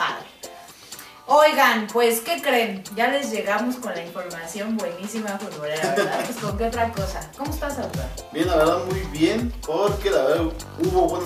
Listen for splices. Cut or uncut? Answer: uncut